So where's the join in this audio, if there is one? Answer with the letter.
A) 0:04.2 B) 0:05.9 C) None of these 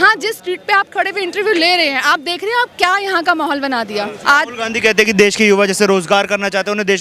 A